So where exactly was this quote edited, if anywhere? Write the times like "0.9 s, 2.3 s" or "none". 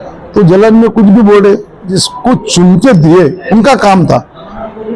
2.0 s